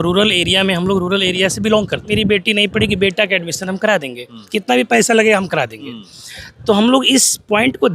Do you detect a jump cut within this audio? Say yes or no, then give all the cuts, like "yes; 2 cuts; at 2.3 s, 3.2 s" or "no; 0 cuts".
yes; 1 cut; at 2.1 s